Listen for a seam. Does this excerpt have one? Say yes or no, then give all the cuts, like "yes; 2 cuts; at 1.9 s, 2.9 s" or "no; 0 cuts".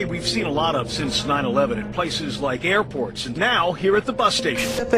yes; 1 cut; at 2.6 s